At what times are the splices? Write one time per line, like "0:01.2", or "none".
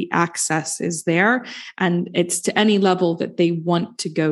none